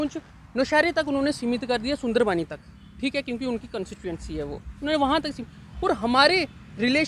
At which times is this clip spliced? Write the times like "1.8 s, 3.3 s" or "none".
none